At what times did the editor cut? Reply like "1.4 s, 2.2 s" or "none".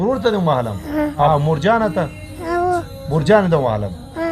1.3 s

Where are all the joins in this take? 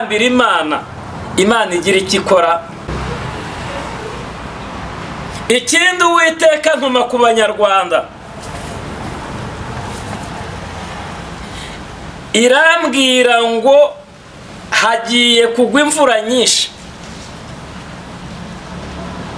2.9 s

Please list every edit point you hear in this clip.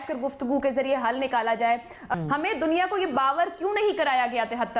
2.1 s

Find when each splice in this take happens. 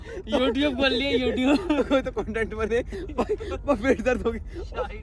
none

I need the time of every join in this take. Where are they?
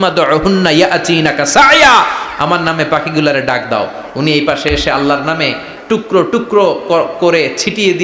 none

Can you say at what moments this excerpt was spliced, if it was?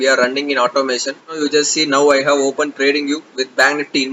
1.3 s

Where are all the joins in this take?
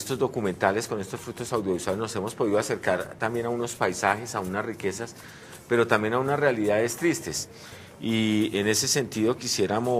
7.1 s

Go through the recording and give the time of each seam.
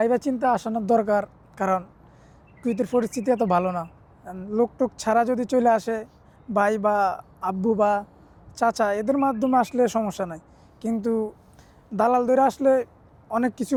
none

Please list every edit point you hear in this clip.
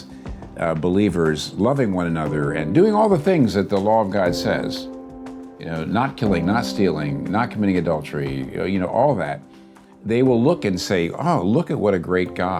none

